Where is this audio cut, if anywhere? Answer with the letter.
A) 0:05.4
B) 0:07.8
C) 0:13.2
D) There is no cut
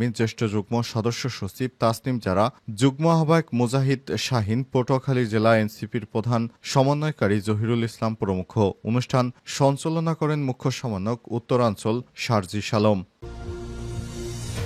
C